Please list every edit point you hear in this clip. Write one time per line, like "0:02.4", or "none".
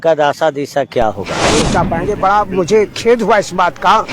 0:01.6